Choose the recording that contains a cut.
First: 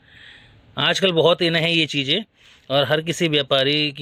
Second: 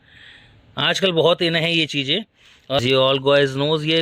second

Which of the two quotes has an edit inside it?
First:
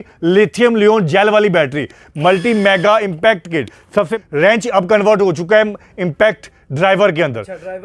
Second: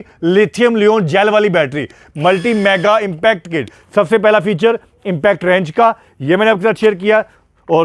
first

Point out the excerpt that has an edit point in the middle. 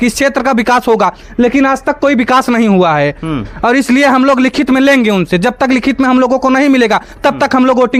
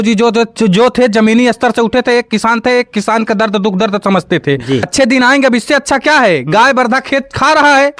second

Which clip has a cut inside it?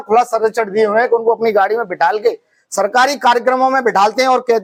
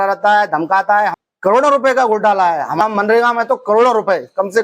second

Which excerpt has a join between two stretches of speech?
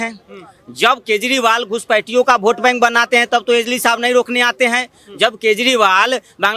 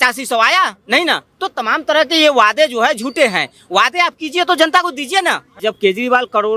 second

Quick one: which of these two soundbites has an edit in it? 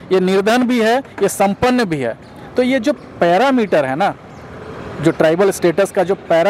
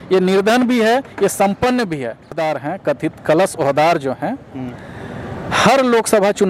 second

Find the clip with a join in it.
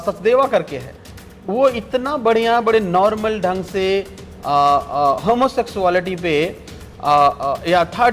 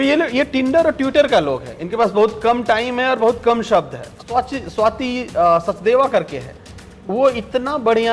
second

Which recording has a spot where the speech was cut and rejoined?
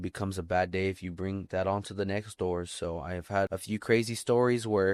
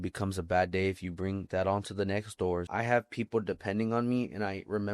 second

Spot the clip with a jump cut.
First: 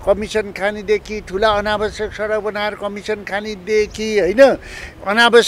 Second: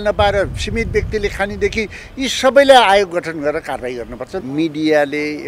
second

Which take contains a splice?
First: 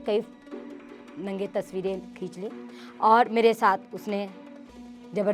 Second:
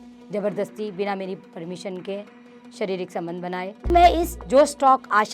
second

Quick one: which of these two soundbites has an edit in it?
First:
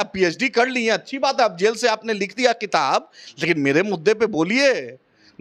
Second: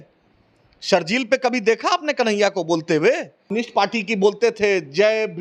second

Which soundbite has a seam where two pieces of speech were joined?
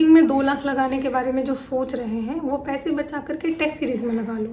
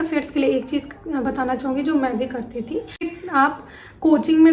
second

